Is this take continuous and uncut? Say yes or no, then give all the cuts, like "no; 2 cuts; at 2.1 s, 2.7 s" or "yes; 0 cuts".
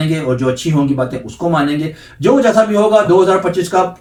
yes; 0 cuts